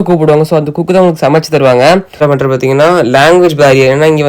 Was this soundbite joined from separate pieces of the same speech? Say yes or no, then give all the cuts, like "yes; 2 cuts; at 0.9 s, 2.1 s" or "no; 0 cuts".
yes; 1 cut; at 2.1 s